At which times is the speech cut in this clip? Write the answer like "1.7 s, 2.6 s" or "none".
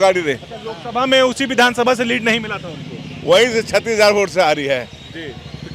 none